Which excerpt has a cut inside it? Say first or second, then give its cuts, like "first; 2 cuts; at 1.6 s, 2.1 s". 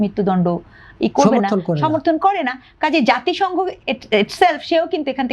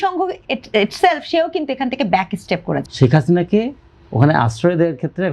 second; 1 cut; at 2.9 s